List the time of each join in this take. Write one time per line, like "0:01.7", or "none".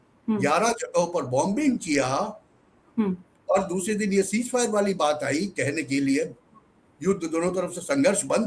none